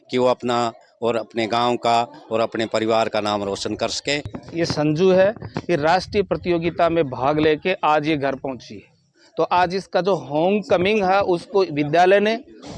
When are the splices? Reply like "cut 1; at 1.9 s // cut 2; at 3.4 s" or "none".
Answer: cut 1; at 4.3 s